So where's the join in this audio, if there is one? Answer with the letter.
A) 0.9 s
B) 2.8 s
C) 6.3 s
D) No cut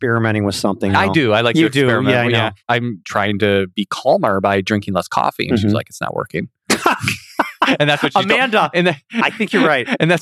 A